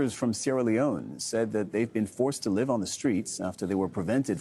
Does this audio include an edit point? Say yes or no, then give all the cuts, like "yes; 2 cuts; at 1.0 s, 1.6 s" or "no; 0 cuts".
no; 0 cuts